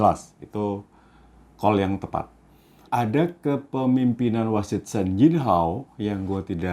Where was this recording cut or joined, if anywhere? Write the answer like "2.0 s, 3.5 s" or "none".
2.9 s